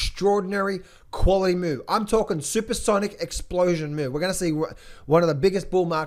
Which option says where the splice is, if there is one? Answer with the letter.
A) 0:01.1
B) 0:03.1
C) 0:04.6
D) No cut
D